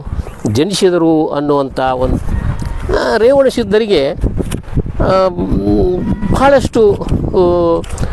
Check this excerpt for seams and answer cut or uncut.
cut